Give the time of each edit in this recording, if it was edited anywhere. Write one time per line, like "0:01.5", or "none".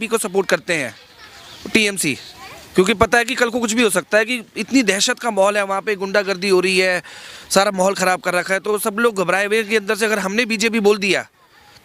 none

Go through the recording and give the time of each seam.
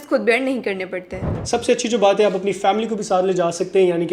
0:01.3

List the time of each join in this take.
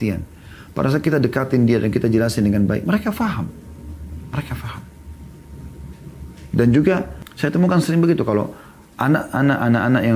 0:07.2

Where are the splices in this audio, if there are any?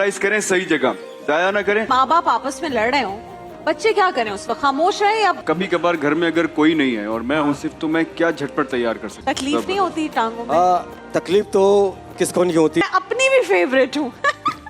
0:01.9
0:05.4
0:09.1
0:12.8

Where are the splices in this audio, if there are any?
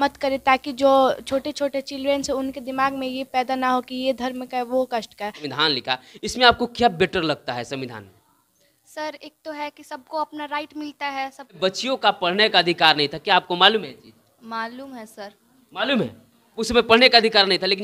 0:05.4
0:11.6

